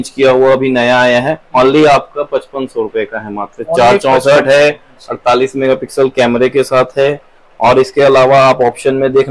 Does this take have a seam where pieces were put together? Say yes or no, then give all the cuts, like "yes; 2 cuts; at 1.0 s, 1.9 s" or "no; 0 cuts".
no; 0 cuts